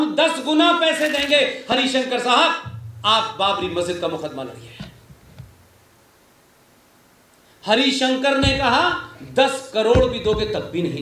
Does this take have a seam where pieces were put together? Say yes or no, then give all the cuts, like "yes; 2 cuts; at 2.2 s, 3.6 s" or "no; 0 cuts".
no; 0 cuts